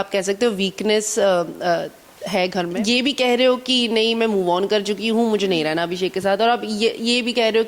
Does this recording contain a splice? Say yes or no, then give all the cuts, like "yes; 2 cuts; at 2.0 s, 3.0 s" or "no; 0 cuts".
yes; 1 cut; at 2.7 s